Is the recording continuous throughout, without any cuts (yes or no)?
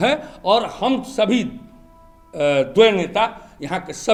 yes